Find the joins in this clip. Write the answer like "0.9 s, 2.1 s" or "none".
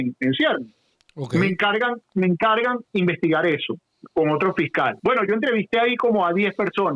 5.0 s